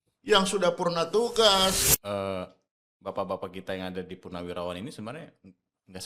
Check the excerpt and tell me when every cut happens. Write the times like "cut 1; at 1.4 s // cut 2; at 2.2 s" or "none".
cut 1; at 1.8 s